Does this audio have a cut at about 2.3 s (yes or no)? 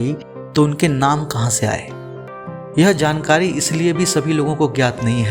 yes